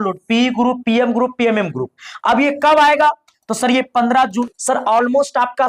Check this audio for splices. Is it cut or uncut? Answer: cut